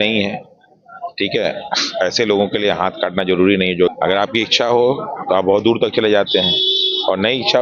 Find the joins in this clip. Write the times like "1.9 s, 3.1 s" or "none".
3.9 s